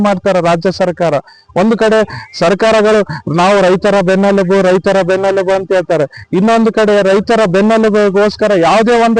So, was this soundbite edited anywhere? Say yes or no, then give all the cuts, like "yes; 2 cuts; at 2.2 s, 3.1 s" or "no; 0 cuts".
no; 0 cuts